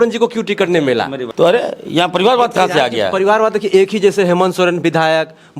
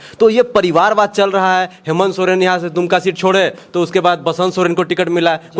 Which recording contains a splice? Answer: first; 1 cut; at 1.2 s

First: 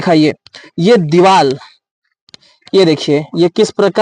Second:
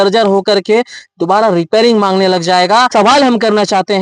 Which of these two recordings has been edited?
second; 1 cut; at 2.9 s

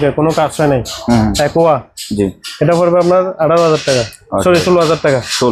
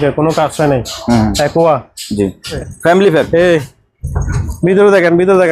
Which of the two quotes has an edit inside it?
second; 1 cut; at 2.6 s

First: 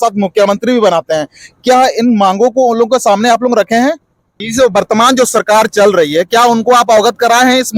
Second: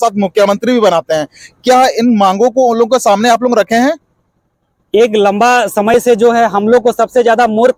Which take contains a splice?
first; 1 cut; at 4.4 s

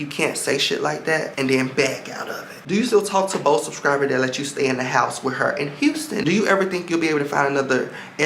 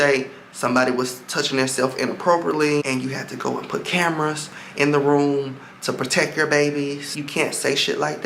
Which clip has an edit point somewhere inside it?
first; 2 cuts; at 2.6 s, 6.2 s

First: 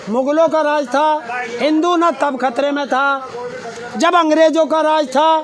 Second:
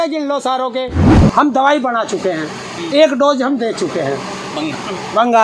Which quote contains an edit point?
second; 1 cut; at 1.1 s

